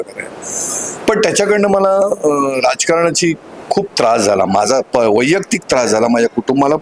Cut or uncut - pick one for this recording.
uncut